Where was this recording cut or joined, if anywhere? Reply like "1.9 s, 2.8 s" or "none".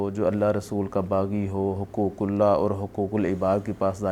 none